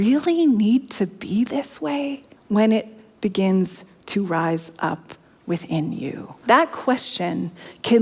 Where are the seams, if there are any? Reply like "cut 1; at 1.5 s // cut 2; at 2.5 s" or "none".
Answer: cut 1; at 2.3 s // cut 2; at 6.3 s